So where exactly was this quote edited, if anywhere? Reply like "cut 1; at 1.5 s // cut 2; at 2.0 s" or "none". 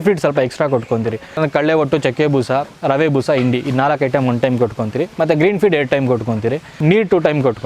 cut 1; at 1.4 s // cut 2; at 6.7 s